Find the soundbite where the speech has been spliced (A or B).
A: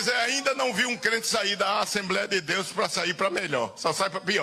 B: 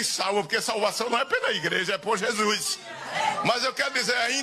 B